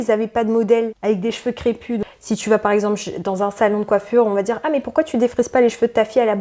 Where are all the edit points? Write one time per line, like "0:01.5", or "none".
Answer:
0:02.0